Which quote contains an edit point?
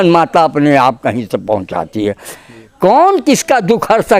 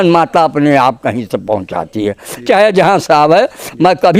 first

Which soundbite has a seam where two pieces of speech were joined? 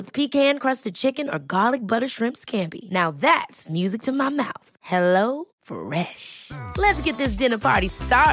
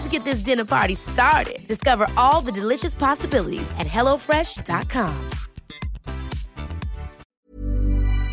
second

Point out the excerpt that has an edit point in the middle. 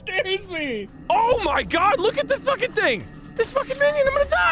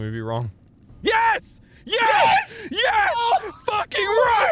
first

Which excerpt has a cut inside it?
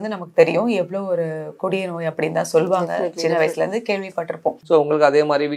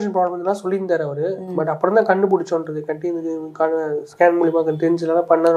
first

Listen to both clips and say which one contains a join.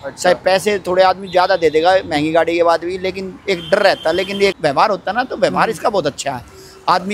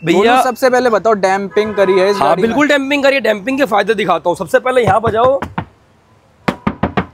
first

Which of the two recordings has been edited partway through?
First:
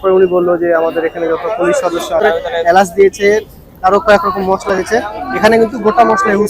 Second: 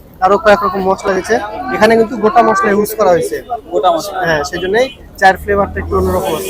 first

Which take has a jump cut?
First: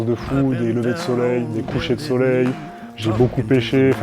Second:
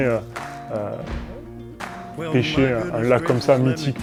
first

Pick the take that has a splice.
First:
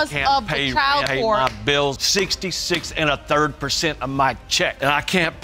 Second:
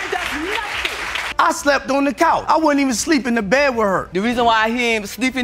second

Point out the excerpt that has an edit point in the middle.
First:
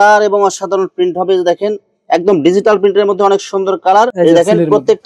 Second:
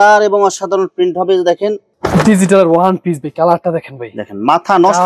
second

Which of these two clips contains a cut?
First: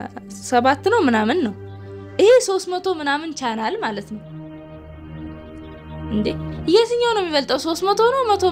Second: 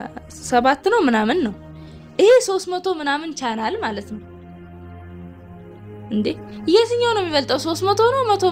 second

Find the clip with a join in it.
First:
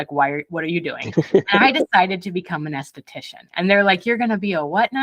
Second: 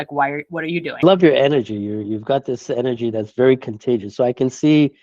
second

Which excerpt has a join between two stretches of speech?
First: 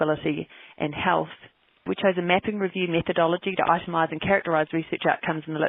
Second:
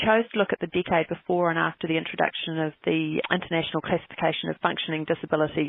first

